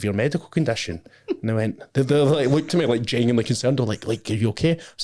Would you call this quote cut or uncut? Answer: uncut